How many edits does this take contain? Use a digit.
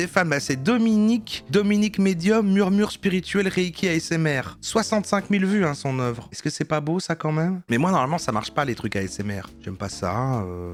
0